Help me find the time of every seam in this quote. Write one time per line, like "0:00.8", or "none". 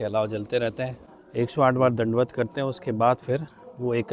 0:01.0